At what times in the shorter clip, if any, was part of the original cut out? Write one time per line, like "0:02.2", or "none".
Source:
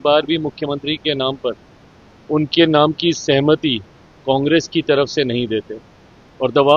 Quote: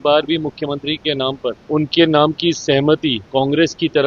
0:01.6
0:03.2